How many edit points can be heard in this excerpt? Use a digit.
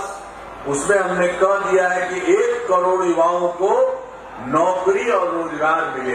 0